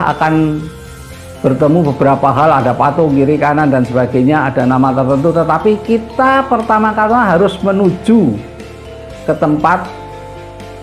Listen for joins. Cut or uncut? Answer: uncut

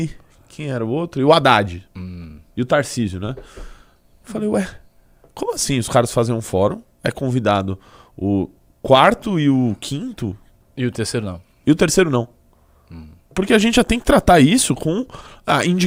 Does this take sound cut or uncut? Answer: uncut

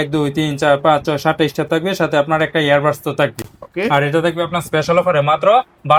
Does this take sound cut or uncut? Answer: uncut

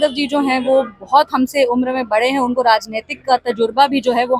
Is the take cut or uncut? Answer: uncut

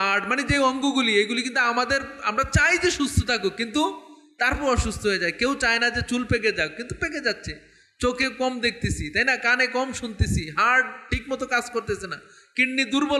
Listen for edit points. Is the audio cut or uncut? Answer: uncut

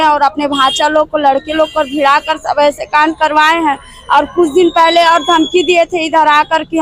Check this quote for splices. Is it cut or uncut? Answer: uncut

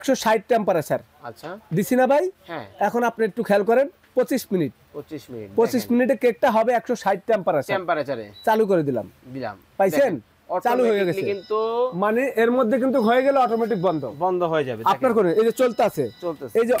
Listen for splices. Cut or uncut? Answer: uncut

